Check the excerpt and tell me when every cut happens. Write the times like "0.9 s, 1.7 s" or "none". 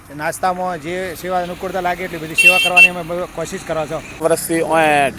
4.2 s